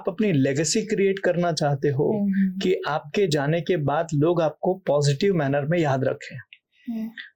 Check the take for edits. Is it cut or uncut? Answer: uncut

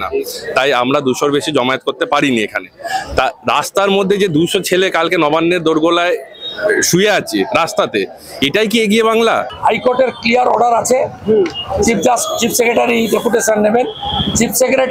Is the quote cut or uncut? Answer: cut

